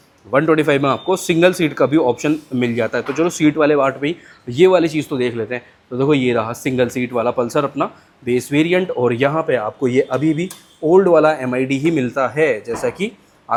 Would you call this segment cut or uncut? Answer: uncut